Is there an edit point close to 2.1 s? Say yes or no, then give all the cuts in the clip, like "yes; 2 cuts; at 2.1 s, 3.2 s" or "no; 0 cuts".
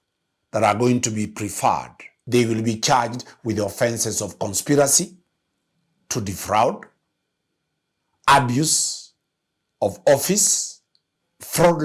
yes; 1 cut; at 2.1 s